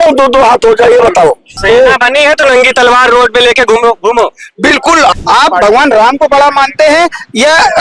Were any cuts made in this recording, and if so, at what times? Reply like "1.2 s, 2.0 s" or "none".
1.6 s, 5.1 s